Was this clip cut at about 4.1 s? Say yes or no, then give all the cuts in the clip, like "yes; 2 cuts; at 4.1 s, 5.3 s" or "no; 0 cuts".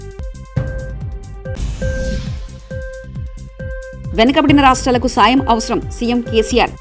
yes; 1 cut; at 4.1 s